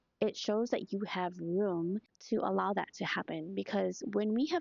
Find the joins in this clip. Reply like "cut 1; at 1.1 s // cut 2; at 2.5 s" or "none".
cut 1; at 2.1 s